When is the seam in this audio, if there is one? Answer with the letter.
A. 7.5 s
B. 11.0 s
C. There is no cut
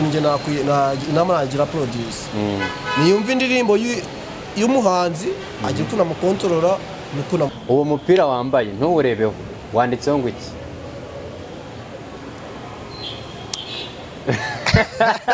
A